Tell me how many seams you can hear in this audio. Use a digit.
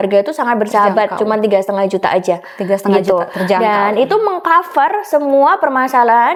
0